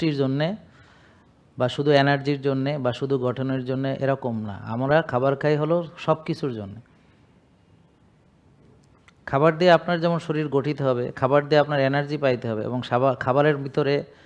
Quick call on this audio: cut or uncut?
uncut